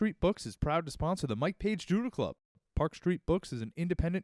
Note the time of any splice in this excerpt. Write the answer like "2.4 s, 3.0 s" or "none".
none

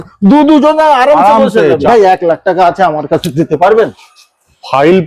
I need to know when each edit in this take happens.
1.8 s

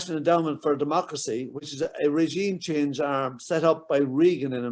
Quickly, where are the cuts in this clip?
none

